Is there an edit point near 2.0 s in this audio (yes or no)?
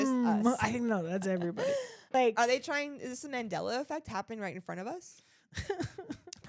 yes